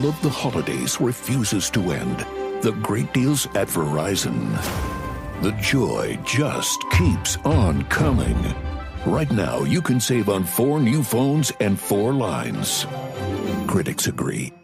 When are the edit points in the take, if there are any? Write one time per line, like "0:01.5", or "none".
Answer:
none

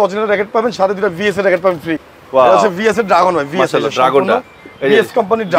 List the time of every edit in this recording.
0:02.0

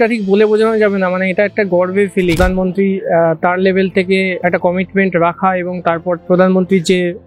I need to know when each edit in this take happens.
0:02.4
0:04.3
0:06.2

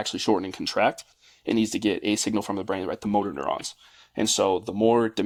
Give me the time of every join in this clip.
none

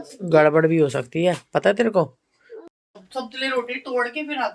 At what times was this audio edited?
0:02.7

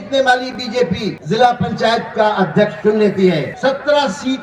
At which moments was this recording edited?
0:01.2
0:03.5

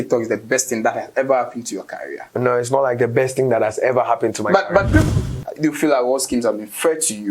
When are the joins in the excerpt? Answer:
0:05.1

